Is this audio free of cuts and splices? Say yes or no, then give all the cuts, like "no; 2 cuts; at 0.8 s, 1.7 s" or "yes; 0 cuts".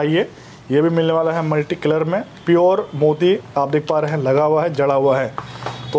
yes; 0 cuts